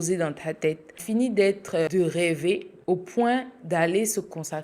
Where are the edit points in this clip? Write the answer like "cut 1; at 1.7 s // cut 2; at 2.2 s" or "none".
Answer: cut 1; at 0.9 s // cut 2; at 1.9 s // cut 3; at 2.7 s